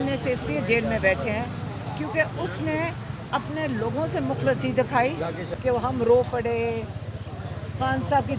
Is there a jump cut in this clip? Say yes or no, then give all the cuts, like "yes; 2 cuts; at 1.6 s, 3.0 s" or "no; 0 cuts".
yes; 1 cut; at 5.5 s